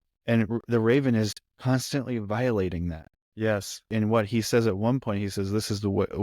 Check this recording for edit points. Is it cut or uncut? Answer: cut